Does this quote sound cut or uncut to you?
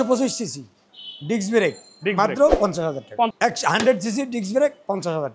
cut